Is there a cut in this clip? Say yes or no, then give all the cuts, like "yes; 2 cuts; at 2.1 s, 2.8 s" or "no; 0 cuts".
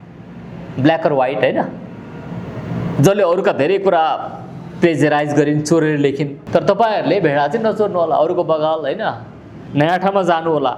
yes; 1 cut; at 6.4 s